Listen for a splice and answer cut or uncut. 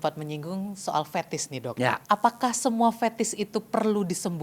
cut